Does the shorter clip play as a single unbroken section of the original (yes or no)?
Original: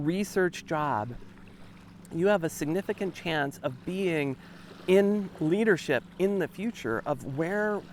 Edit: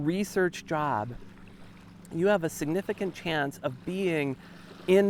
yes